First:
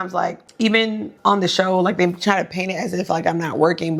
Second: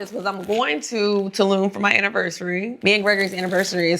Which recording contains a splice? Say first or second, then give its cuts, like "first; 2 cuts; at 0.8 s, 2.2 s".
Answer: second; 1 cut; at 2.7 s